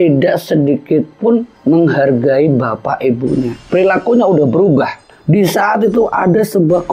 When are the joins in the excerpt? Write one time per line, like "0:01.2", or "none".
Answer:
0:05.1